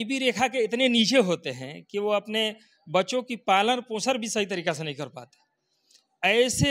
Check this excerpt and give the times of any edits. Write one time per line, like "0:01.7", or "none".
none